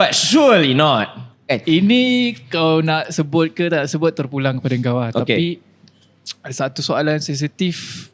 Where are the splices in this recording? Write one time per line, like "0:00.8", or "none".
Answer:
0:01.5